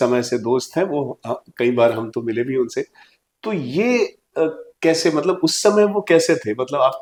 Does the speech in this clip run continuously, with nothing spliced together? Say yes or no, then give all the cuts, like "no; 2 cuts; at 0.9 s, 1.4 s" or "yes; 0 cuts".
yes; 0 cuts